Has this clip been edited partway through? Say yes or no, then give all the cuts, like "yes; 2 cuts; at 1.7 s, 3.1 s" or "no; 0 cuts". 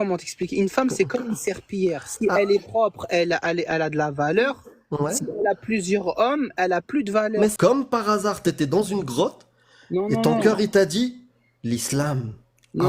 yes; 1 cut; at 7.5 s